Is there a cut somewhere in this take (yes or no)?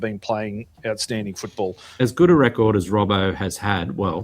yes